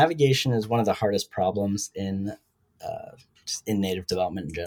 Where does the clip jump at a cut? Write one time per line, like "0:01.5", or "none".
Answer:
none